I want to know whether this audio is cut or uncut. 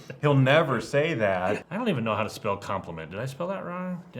cut